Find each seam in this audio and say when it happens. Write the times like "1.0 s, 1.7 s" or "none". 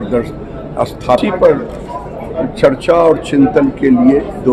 1.2 s